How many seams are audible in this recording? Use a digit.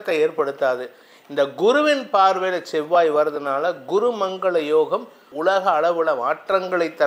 1